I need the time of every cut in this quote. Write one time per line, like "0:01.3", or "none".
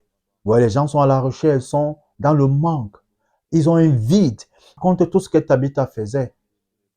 0:04.7